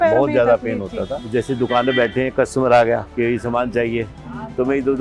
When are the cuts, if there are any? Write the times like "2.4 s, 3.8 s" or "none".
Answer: 1.2 s, 3.1 s